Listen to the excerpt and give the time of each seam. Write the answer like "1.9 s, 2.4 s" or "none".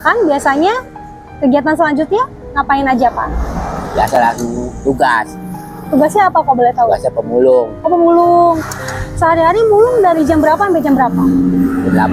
none